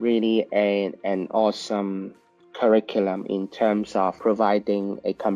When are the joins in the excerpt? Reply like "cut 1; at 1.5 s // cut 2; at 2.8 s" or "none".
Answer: cut 1; at 4.2 s

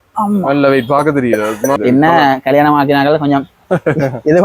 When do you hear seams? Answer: cut 1; at 1.8 s

